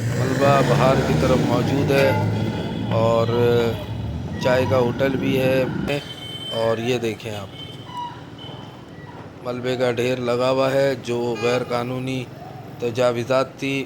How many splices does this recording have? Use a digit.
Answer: 1